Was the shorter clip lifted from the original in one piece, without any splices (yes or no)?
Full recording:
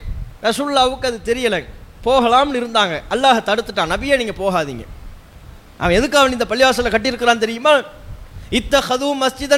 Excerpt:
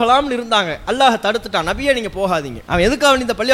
no